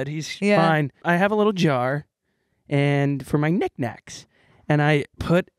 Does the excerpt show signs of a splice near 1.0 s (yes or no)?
yes